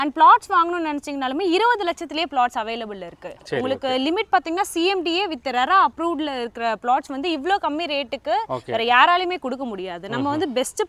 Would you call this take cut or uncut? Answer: uncut